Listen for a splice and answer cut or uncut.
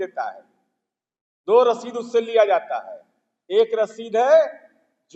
uncut